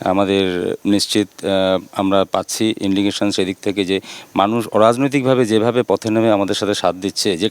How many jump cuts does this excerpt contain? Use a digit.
0